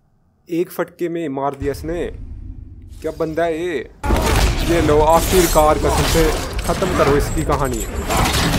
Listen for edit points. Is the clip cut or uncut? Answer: cut